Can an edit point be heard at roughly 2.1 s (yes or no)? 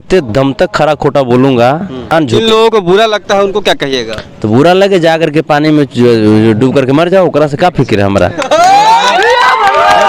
yes